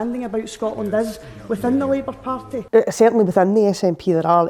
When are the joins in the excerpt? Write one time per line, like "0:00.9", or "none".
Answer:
none